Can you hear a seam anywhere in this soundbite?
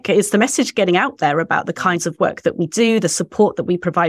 no; 0 cuts

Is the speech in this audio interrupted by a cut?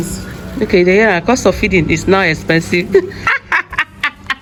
no; 0 cuts

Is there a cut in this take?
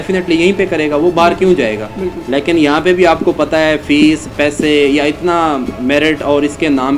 no; 0 cuts

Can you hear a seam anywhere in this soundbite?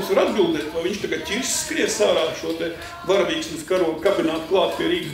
no; 0 cuts

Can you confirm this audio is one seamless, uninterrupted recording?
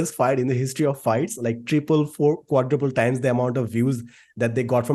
yes; 0 cuts

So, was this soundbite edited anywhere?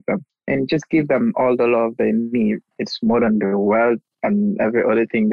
no; 0 cuts

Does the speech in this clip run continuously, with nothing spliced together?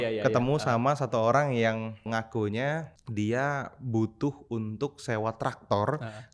no; 2 cuts; at 2.0 s, 3.0 s

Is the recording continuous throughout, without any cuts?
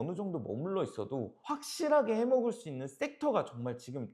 yes; 0 cuts

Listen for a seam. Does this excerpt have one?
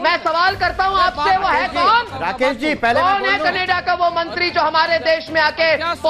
no; 0 cuts

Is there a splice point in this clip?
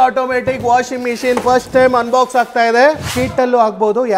yes; 1 cut; at 3.1 s

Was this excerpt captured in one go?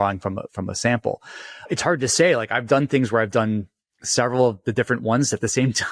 no; 1 cut; at 1.6 s

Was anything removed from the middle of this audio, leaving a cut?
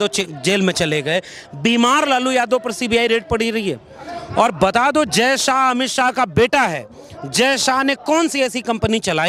no; 0 cuts

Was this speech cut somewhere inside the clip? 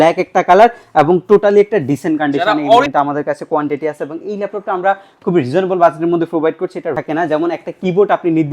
yes; 2 cuts; at 2.9 s, 7.0 s

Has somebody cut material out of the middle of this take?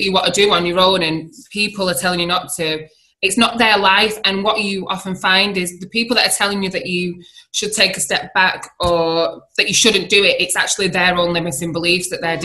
no; 0 cuts

